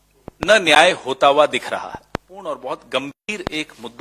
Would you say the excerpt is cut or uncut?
cut